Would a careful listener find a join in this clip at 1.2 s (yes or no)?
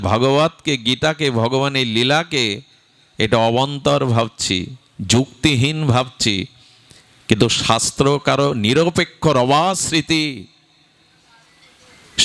no